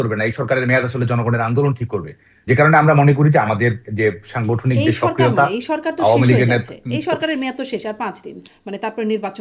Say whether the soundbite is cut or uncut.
uncut